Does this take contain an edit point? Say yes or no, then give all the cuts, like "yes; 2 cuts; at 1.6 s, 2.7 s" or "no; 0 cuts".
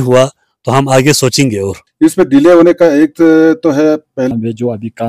yes; 2 cuts; at 1.8 s, 4.3 s